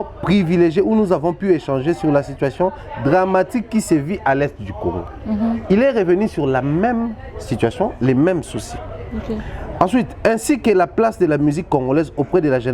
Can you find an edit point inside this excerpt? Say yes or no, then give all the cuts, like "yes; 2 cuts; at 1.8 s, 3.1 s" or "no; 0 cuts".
no; 0 cuts